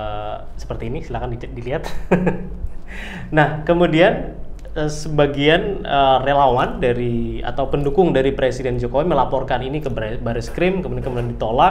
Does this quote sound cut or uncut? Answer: uncut